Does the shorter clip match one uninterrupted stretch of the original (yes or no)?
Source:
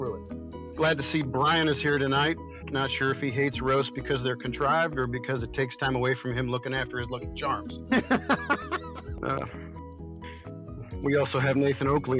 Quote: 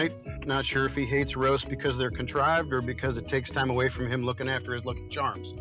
yes